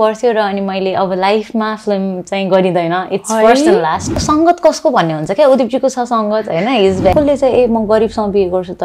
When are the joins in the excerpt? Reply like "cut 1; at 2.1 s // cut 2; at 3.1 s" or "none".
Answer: cut 1; at 4.2 s // cut 2; at 7.1 s